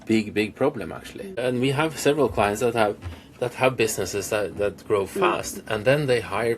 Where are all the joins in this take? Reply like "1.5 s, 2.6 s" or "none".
1.4 s